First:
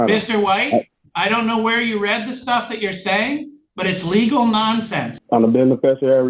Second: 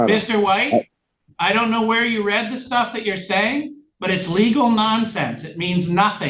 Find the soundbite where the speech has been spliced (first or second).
first